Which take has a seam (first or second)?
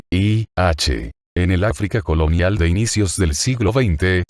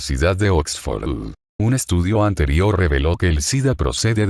first